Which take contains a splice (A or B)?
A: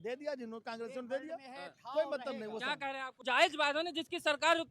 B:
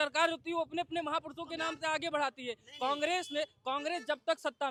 A